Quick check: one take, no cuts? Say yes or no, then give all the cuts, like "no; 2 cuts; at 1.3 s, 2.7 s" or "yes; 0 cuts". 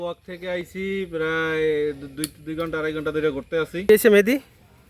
no; 1 cut; at 3.9 s